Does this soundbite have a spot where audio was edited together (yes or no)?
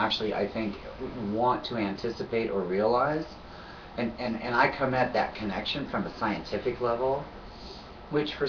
no